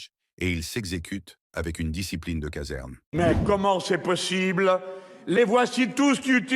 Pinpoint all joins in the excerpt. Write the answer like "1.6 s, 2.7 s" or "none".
3.1 s